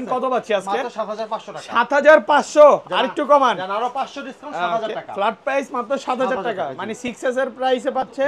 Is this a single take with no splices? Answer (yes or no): yes